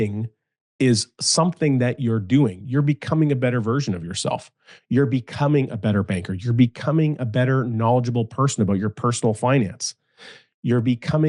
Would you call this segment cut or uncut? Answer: uncut